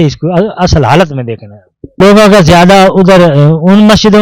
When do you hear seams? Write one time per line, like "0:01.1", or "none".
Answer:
0:02.0